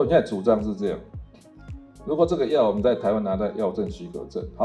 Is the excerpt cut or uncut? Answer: uncut